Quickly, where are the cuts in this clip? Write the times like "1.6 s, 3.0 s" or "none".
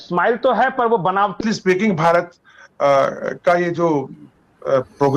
1.3 s